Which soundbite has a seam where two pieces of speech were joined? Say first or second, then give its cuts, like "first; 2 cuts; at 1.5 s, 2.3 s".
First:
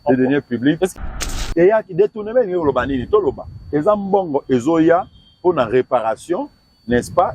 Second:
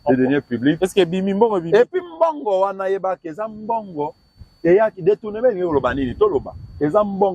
first; 1 cut; at 0.9 s